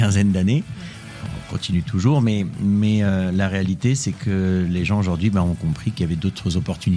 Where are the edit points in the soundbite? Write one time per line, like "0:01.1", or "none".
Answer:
none